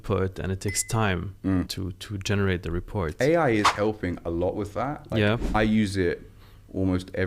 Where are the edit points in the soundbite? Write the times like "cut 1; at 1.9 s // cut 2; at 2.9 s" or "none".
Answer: cut 1; at 1.7 s // cut 2; at 5.5 s